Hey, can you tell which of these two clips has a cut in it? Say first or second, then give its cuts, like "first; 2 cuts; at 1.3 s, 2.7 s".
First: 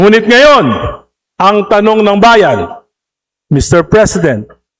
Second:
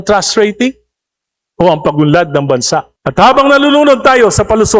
second; 1 cut; at 3.0 s